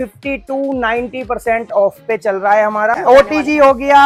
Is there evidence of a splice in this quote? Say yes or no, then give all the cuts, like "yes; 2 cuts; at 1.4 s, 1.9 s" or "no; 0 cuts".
no; 0 cuts